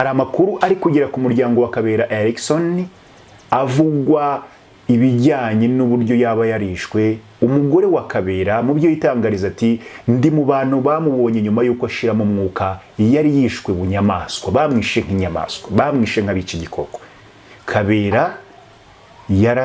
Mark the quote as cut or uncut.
uncut